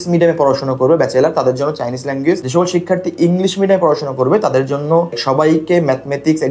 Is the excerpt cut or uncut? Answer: uncut